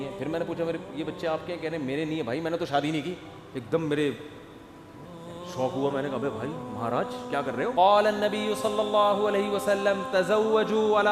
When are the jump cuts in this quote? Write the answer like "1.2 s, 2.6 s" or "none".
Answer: 7.7 s